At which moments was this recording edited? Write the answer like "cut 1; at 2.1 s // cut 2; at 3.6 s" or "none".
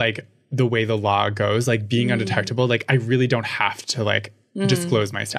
none